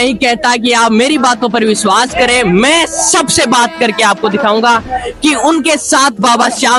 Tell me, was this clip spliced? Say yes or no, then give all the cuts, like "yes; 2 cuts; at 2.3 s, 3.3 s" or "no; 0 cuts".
no; 0 cuts